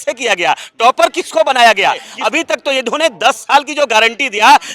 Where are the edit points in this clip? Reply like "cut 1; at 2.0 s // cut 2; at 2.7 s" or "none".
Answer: cut 1; at 2.1 s